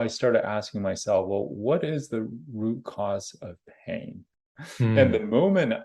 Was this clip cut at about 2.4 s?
no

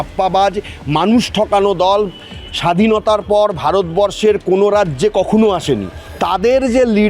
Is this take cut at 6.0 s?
yes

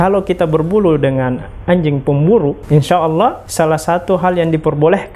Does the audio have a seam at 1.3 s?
no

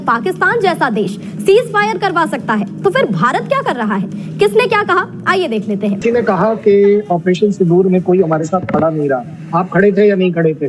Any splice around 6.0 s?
yes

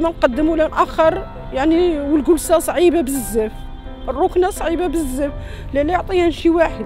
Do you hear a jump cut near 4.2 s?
no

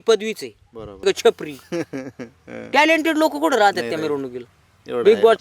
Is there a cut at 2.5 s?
no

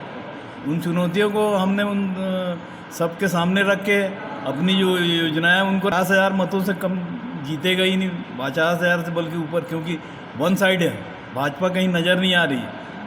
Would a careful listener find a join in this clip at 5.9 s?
yes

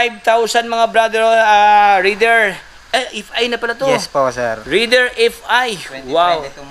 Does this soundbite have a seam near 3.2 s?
no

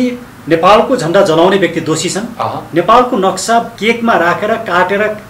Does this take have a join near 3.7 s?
yes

